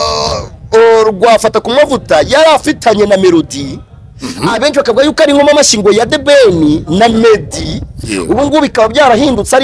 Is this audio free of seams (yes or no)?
yes